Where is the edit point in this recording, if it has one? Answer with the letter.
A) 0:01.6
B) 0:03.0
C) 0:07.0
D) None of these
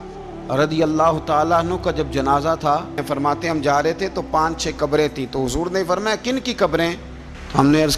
B